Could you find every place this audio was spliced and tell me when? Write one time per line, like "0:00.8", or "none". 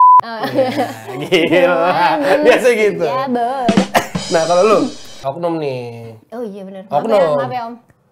0:05.2